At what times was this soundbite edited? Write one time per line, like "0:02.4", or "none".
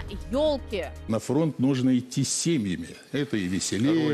0:01.1